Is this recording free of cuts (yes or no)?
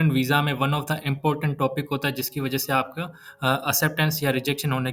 yes